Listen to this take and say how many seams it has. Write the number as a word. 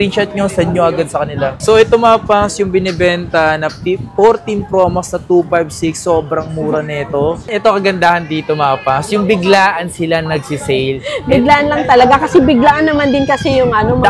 two